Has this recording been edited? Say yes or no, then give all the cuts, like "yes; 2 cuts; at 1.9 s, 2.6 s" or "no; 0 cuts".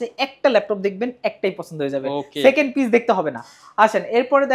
no; 0 cuts